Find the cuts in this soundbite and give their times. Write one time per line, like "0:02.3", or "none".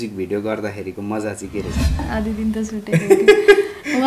0:02.0